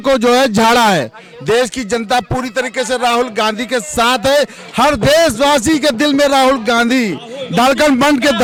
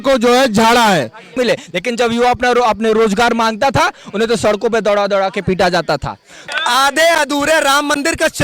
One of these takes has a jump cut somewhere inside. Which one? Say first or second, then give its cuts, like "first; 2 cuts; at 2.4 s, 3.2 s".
second; 2 cuts; at 1.4 s, 6.4 s